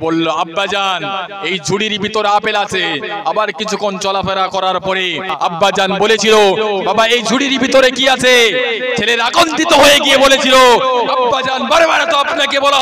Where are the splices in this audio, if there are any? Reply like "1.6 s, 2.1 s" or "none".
5.3 s